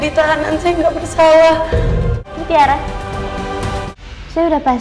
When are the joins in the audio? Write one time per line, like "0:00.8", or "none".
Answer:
0:02.2